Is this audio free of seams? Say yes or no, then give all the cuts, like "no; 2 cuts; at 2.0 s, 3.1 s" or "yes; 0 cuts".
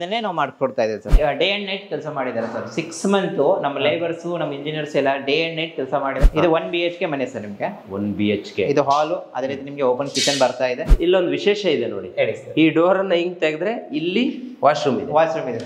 no; 3 cuts; at 1.1 s, 6.2 s, 10.9 s